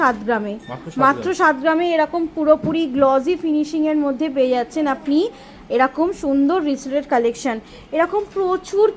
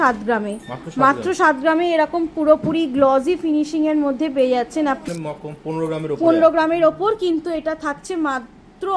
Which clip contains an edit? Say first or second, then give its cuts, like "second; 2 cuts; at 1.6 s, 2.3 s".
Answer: second; 1 cut; at 5.0 s